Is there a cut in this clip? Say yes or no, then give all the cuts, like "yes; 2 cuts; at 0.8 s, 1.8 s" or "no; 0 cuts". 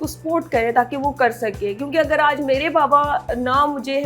no; 0 cuts